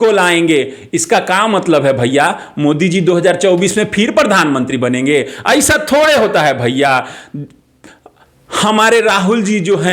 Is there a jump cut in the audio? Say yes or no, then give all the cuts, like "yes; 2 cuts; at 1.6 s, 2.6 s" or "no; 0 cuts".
no; 0 cuts